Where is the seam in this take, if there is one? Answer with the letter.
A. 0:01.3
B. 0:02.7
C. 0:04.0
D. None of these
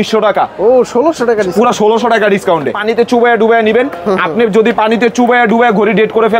B